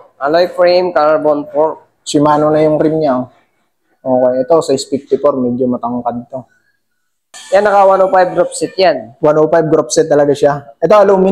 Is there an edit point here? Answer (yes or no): yes